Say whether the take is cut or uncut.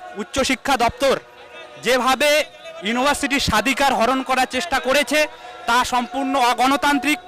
uncut